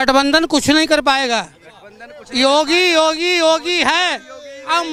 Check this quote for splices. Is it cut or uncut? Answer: uncut